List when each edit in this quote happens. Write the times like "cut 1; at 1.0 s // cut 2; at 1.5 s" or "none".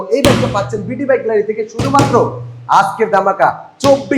none